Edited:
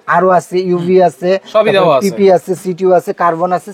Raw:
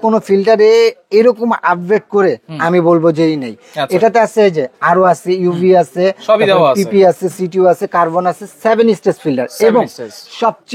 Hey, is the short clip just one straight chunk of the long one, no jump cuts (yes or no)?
yes